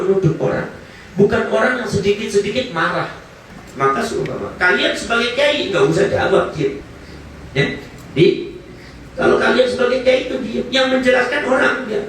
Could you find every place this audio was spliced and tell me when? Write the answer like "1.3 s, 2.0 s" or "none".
3.4 s